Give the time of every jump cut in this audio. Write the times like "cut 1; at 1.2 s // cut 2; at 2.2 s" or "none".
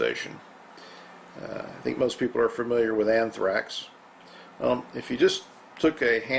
none